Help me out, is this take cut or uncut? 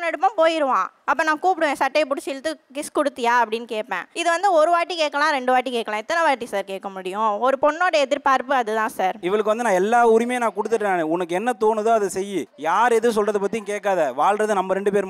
cut